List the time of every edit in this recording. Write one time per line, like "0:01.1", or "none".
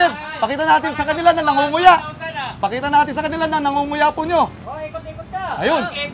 none

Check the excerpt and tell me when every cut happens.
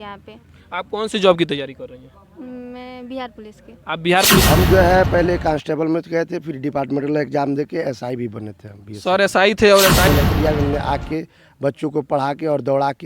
0:04.5
0:09.9

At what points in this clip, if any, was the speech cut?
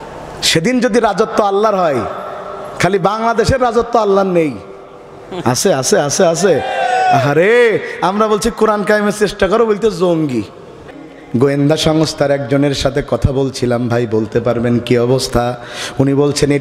0:10.9

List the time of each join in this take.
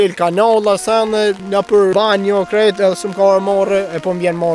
0:01.8

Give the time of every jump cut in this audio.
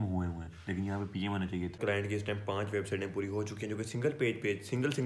0:01.8

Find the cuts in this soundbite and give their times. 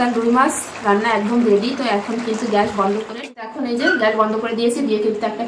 0:03.1

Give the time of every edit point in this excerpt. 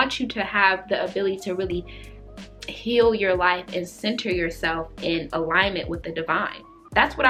none

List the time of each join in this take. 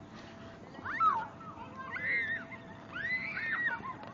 0:01.7

